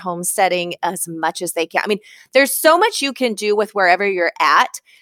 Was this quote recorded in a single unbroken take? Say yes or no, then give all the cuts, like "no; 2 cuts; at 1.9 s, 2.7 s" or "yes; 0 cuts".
yes; 0 cuts